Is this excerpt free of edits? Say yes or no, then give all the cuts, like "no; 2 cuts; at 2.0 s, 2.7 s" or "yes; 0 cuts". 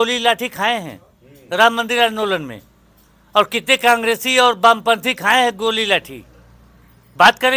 yes; 0 cuts